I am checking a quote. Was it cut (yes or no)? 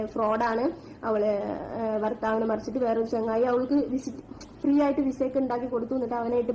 no